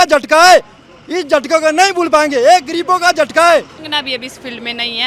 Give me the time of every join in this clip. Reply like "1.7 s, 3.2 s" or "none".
3.8 s